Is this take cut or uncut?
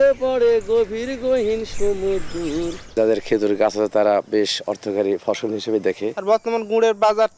cut